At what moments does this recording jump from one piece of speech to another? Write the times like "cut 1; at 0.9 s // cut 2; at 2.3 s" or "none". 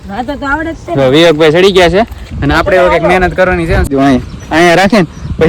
cut 1; at 3.9 s